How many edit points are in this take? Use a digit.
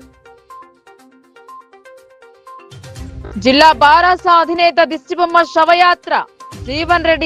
2